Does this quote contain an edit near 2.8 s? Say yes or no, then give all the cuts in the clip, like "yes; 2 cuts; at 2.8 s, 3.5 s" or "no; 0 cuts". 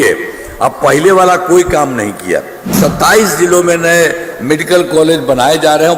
yes; 1 cut; at 2.8 s